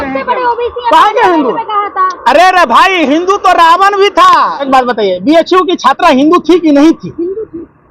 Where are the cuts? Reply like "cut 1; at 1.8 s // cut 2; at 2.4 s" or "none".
cut 1; at 4.7 s